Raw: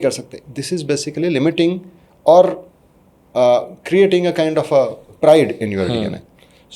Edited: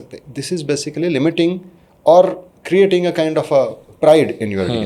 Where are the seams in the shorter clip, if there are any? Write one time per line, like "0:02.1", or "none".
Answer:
0:02.5

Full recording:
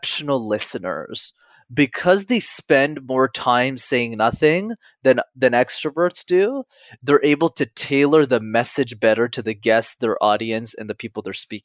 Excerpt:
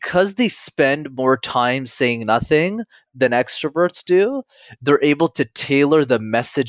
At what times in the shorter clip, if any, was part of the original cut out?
0:03.0

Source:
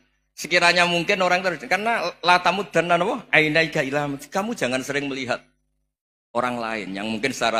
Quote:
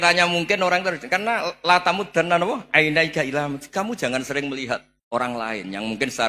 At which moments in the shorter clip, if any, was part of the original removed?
0:04.9

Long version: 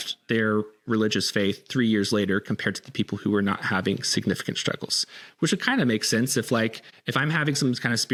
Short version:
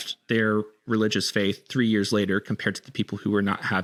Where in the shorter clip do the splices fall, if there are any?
none

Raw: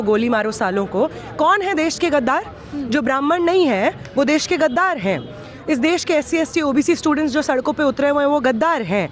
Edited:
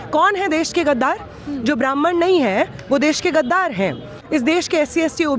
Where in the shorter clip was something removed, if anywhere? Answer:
0:04.1

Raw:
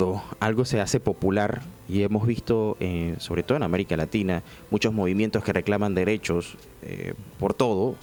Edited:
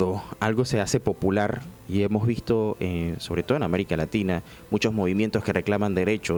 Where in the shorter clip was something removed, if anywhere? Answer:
none

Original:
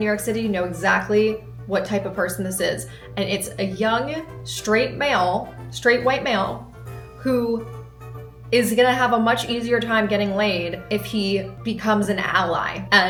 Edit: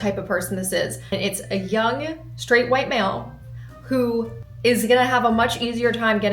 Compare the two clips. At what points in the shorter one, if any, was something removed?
0:01.0
0:02.3
0:04.4

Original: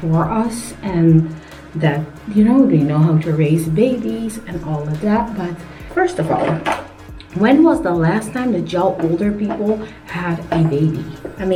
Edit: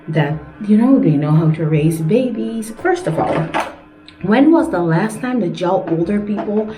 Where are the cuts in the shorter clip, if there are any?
0:02.7

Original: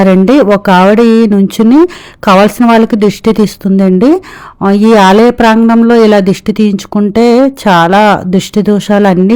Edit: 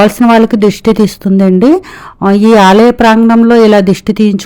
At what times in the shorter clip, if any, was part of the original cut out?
none

